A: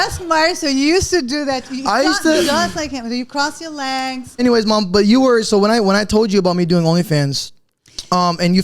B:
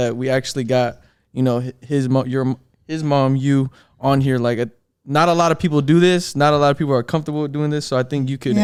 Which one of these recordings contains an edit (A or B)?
A